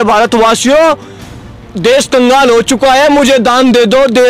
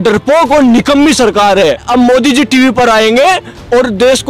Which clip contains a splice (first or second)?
second